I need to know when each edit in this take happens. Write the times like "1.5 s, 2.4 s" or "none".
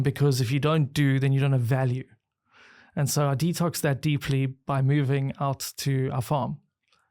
none